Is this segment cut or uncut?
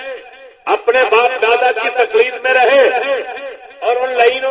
uncut